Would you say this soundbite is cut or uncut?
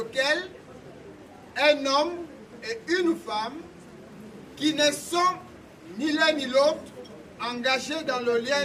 uncut